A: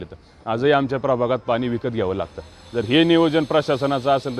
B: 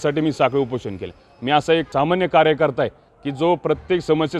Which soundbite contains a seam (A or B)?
B